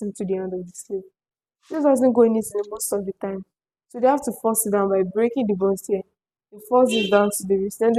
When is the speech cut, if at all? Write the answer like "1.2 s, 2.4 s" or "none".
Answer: none

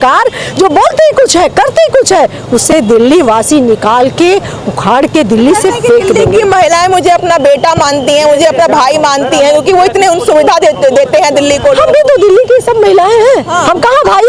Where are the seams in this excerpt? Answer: none

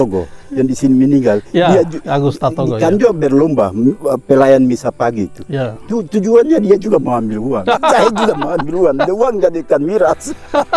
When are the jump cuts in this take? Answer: none

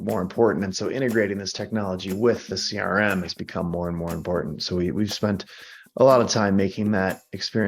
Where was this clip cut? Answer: none

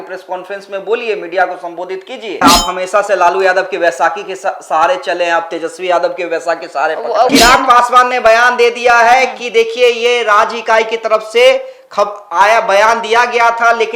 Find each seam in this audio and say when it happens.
2.4 s, 7.3 s

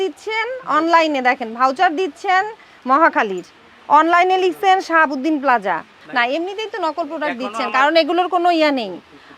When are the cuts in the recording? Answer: 6.0 s

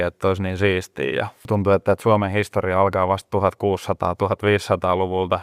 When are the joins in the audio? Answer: 1.4 s

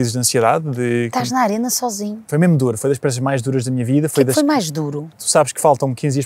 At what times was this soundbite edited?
2.3 s, 5.2 s

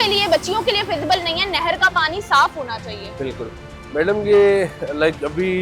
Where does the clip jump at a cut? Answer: none

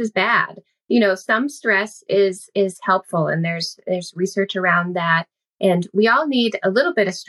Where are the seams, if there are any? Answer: none

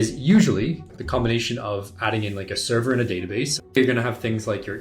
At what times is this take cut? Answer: 0.9 s, 3.8 s

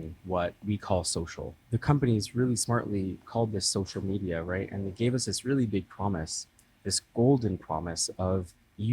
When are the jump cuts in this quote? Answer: 1.5 s

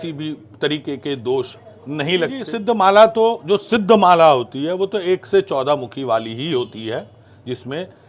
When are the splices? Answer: 2.4 s

